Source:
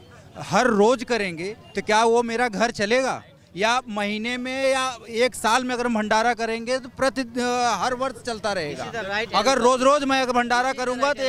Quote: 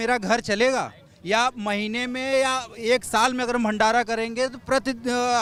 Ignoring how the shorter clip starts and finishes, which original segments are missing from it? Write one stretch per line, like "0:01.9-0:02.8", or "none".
none